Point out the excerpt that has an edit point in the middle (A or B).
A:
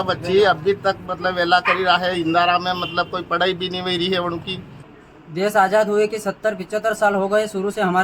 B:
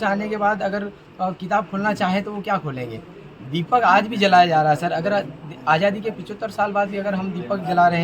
A